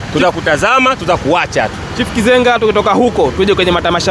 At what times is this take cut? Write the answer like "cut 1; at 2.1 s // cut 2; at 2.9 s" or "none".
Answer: none

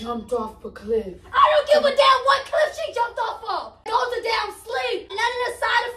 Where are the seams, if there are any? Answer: cut 1; at 3.9 s // cut 2; at 5.1 s

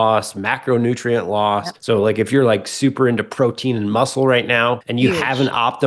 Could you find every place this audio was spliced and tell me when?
cut 1; at 1.7 s // cut 2; at 4.9 s

